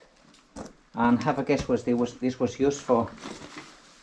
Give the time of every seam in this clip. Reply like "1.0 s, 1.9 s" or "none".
none